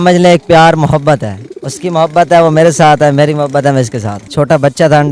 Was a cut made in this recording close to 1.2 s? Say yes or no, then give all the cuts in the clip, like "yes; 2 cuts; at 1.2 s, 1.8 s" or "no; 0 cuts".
no; 1 cut; at 4.2 s